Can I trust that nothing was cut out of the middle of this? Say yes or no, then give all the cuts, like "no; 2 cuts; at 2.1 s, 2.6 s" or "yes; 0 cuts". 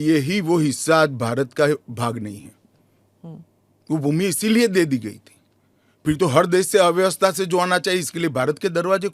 yes; 0 cuts